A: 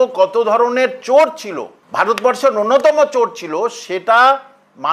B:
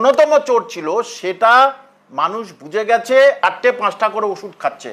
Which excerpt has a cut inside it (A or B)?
B